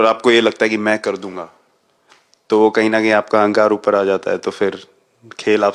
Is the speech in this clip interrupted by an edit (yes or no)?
no